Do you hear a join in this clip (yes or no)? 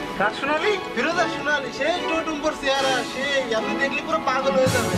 no